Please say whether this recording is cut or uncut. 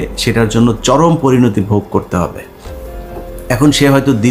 uncut